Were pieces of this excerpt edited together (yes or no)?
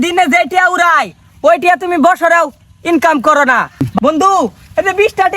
yes